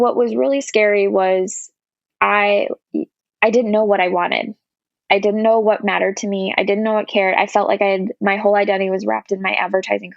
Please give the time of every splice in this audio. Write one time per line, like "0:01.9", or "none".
none